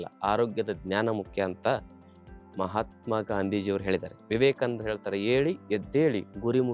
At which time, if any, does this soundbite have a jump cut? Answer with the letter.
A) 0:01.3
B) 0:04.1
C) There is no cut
B